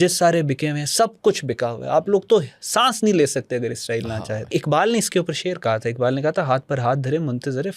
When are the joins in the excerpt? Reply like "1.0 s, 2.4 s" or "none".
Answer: 4.5 s